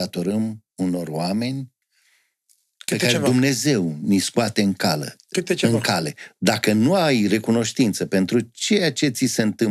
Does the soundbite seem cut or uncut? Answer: uncut